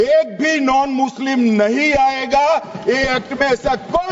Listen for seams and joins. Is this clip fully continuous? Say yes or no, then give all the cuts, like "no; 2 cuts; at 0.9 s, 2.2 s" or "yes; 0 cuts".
yes; 0 cuts